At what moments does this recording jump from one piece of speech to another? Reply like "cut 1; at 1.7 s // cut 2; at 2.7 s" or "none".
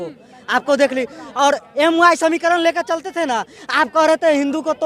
none